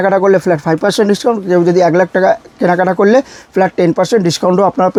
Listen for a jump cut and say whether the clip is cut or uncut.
uncut